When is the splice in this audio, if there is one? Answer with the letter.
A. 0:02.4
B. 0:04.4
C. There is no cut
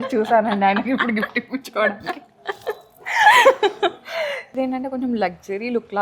B